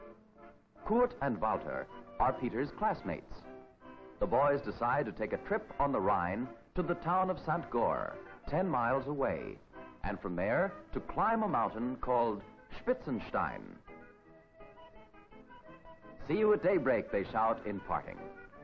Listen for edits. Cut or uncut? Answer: uncut